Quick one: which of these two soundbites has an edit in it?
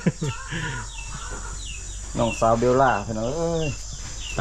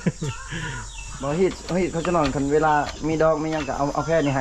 second; 1 cut; at 1.1 s

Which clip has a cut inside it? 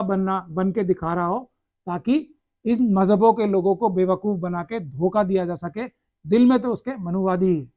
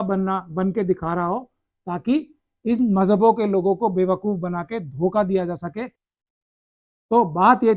second; 1 cut; at 6.1 s

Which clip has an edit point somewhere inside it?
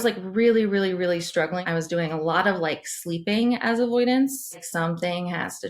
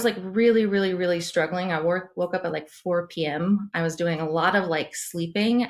first; 2 cuts; at 1.6 s, 4.7 s

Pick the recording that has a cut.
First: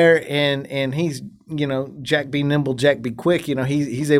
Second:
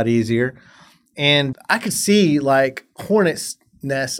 second; 1 cut; at 1.5 s

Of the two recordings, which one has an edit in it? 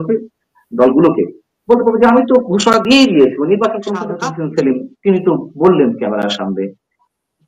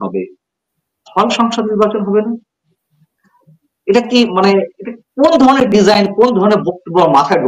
first; 1 cut; at 4.1 s

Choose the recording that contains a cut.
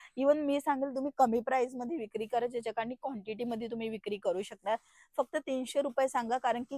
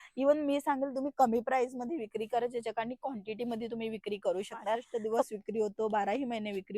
second; 1 cut; at 4.9 s

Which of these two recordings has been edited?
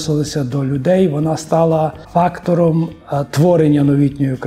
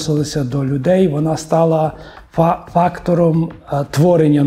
first; 1 cut; at 2.0 s

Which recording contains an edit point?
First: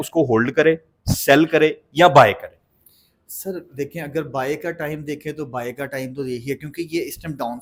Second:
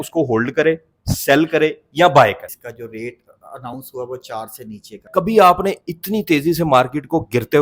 second; 2 cuts; at 2.5 s, 5.1 s

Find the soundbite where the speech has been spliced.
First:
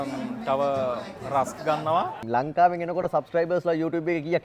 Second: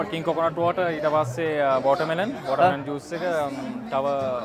first; 1 cut; at 2.2 s

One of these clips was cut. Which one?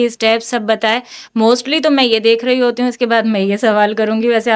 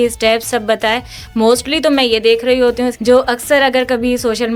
second; 1 cut; at 2.9 s

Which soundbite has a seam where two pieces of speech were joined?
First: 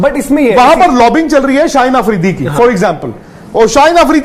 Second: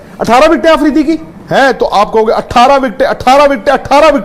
second; 1 cut; at 1.3 s

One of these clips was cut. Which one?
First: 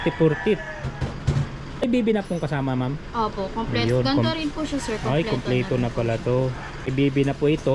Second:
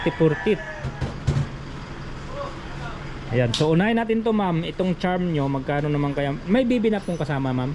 first; 2 cuts; at 1.8 s, 6.9 s

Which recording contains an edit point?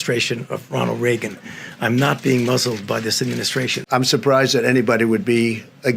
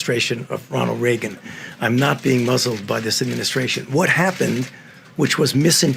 first; 1 cut; at 3.8 s

